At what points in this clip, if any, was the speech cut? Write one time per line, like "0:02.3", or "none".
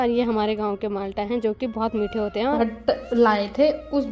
0:02.6